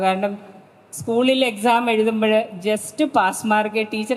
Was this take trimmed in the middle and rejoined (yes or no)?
no